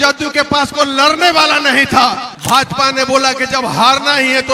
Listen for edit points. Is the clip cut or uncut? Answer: cut